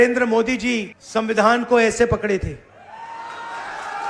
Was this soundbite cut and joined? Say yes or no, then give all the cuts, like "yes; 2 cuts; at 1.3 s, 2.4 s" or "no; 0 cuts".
yes; 1 cut; at 0.9 s